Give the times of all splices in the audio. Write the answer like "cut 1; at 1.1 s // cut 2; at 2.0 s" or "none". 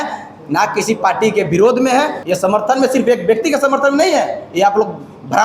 cut 1; at 2.2 s